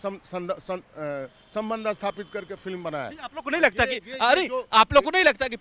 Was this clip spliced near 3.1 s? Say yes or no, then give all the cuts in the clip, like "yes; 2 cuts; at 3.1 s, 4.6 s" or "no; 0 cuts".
no; 0 cuts